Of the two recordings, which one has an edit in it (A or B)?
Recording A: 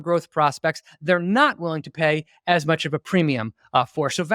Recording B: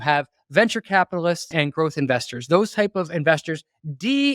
B